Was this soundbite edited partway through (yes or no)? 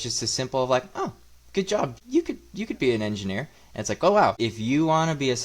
yes